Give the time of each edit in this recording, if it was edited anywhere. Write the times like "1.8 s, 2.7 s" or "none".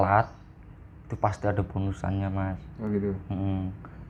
none